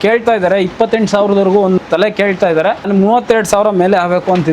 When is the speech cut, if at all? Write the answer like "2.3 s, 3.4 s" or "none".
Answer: 1.8 s, 2.9 s